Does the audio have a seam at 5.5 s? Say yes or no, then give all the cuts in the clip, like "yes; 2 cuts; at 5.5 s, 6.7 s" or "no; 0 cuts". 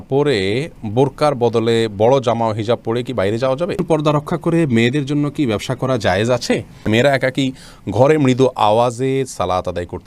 no; 2 cuts; at 3.8 s, 6.8 s